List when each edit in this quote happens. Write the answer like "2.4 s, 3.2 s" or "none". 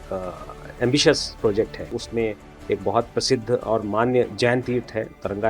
1.8 s